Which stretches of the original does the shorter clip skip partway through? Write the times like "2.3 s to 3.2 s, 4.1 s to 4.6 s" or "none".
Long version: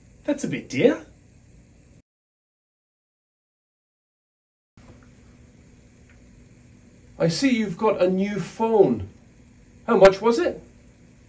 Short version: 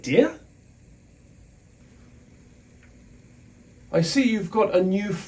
2.5 s to 5.1 s